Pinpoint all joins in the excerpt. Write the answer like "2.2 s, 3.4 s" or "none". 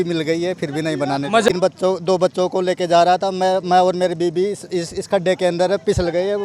1.6 s